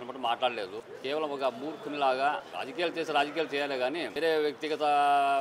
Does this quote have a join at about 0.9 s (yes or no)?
yes